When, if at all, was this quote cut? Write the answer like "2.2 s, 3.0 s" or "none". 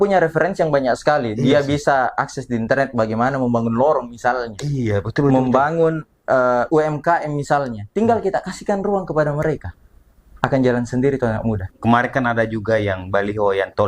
11.7 s

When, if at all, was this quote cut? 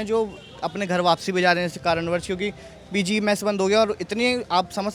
none

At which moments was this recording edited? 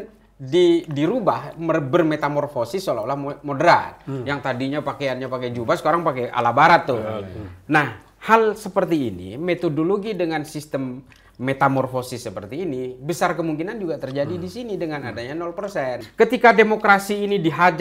16.0 s

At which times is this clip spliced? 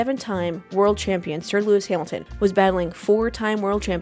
2.2 s

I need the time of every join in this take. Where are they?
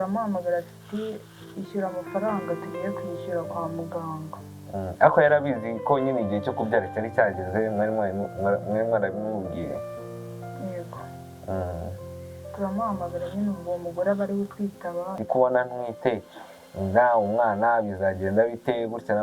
15.2 s

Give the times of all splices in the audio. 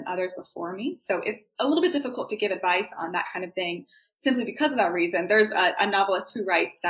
none

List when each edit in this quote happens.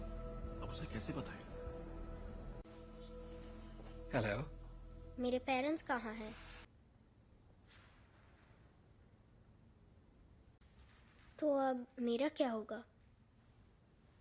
6.7 s

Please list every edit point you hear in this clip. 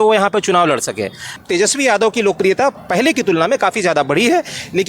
1.3 s

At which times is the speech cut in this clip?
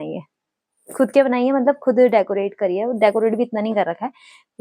none

